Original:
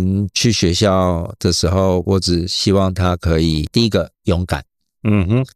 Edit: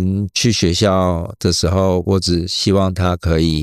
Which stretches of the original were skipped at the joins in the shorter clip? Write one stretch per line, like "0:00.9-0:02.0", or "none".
none